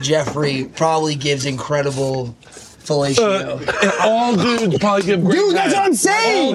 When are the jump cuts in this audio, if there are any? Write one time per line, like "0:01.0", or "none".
none